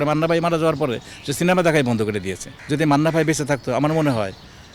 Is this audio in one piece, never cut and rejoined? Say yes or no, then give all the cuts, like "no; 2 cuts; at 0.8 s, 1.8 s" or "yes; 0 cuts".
no; 1 cut; at 2.5 s